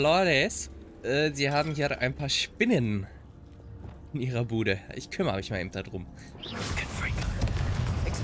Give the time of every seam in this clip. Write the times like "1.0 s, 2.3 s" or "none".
none